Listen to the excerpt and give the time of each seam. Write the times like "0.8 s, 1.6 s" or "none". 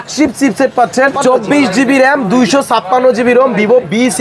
1.2 s

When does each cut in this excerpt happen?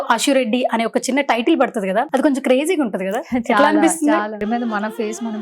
2.1 s, 4.4 s

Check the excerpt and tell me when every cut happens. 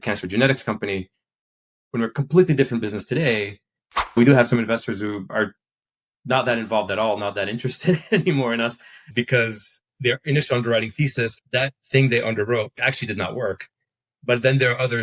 4.2 s, 5.3 s, 11.4 s, 12.8 s

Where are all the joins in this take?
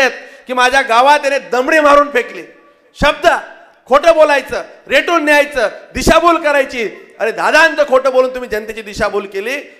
none

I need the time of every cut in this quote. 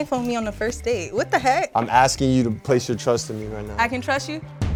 none

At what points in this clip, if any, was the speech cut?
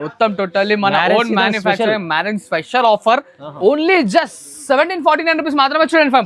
3.4 s

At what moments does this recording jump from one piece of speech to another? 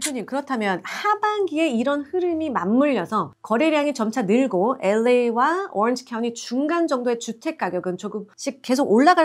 3.3 s, 8.3 s

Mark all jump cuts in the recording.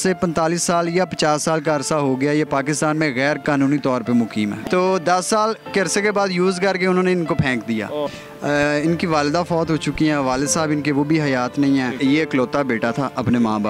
4.6 s, 8.2 s, 12.0 s

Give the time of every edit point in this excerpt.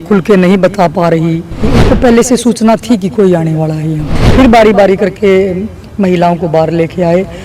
1.7 s, 4.1 s

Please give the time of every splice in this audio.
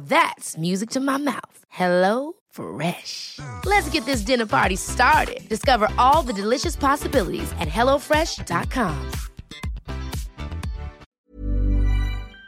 11.1 s

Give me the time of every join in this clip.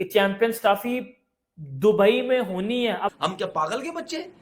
3.2 s

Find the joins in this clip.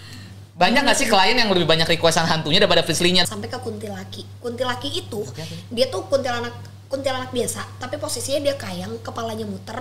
3.3 s

